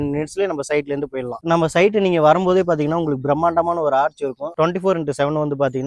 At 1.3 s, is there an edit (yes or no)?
yes